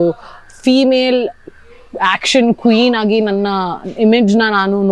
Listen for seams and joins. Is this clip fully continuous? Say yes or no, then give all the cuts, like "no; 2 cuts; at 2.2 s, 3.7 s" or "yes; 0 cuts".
yes; 0 cuts